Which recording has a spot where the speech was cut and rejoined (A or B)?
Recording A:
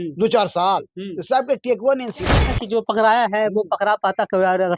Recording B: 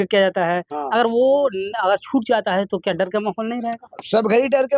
A